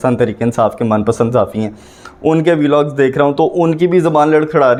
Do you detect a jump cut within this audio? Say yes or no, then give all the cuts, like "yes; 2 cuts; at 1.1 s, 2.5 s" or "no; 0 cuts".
no; 0 cuts